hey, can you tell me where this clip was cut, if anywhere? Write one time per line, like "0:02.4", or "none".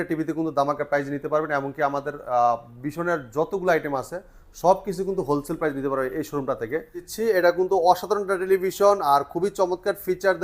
0:07.1